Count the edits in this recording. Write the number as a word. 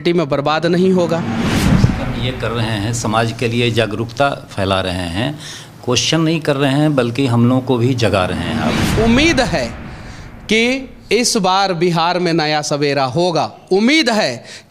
two